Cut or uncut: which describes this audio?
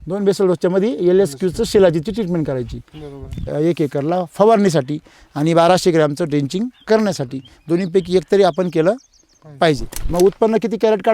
cut